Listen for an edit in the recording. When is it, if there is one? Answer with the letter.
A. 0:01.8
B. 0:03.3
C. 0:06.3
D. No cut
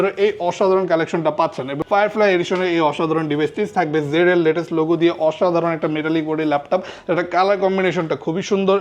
A